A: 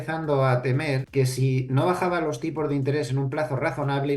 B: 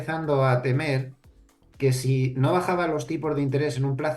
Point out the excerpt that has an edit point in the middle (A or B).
A